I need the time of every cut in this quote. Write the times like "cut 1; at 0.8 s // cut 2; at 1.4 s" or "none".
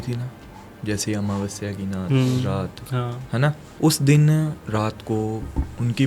cut 1; at 3.7 s // cut 2; at 4.6 s